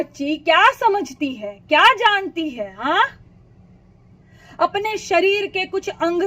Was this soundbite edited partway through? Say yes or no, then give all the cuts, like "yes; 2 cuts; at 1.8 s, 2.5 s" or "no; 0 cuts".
no; 0 cuts